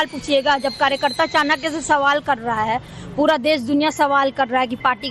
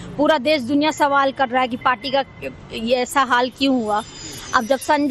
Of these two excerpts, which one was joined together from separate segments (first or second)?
second